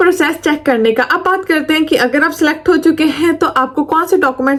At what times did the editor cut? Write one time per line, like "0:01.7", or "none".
none